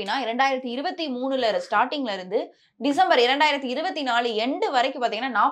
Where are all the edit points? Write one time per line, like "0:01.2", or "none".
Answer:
none